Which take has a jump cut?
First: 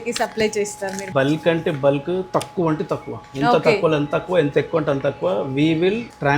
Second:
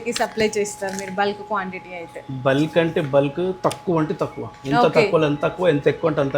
first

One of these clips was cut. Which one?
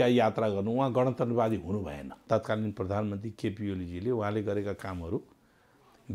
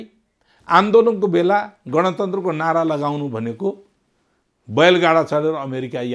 first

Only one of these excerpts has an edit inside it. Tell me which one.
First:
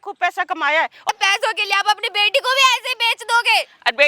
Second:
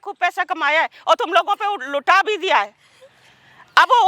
first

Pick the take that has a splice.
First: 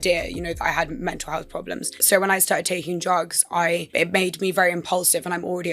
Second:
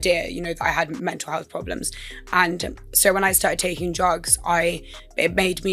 first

